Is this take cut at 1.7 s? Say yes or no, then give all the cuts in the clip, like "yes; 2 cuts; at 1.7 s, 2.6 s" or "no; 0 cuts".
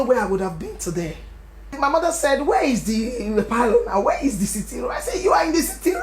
yes; 1 cut; at 1.7 s